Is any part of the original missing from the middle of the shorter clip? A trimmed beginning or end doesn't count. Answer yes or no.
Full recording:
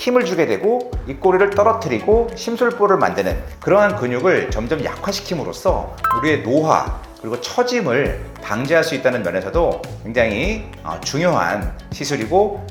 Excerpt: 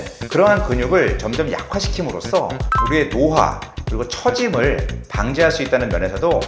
no